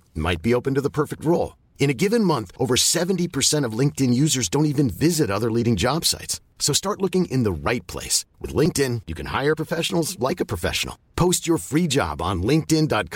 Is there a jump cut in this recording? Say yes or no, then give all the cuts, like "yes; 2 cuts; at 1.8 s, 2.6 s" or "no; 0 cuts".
no; 0 cuts